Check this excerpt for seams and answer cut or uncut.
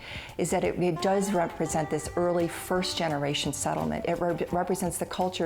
uncut